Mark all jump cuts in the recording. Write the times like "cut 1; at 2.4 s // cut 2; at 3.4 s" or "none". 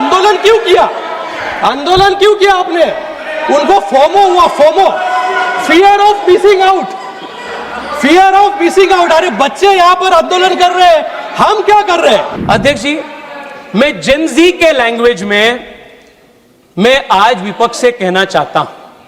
cut 1; at 12.3 s